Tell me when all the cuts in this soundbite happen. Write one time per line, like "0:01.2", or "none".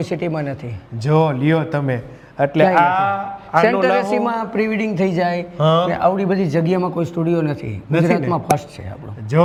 none